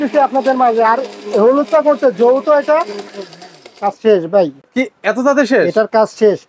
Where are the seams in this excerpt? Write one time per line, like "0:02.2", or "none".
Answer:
none